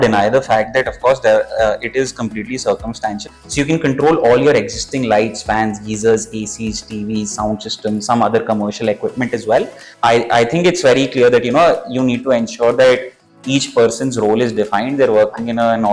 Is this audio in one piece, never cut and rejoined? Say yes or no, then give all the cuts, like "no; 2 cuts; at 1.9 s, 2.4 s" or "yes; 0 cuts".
no; 2 cuts; at 3.2 s, 9.8 s